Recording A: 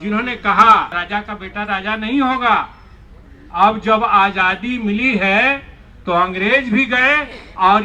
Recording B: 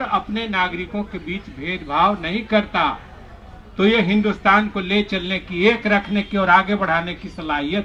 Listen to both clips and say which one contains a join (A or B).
A